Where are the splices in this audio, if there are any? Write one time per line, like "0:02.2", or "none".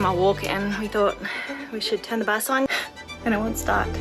0:02.7